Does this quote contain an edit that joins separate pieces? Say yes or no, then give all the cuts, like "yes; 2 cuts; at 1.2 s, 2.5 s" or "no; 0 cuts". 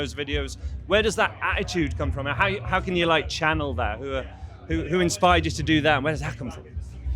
no; 0 cuts